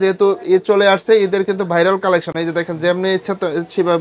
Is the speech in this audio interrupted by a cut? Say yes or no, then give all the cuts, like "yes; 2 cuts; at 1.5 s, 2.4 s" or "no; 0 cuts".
no; 0 cuts